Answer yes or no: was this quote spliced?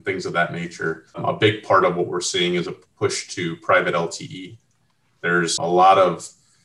yes